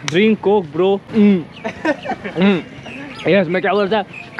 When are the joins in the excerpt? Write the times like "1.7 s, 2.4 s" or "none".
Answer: 1.1 s, 2.8 s